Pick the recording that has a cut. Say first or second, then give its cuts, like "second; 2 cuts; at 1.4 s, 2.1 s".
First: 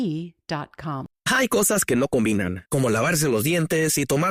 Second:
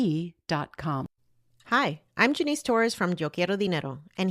second; 1 cut; at 1.1 s